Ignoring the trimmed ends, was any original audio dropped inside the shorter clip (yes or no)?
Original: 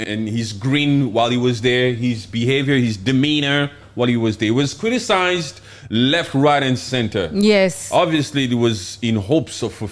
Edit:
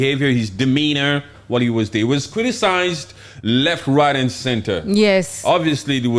no